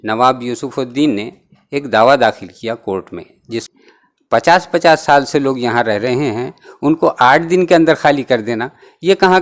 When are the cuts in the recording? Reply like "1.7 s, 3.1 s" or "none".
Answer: 3.7 s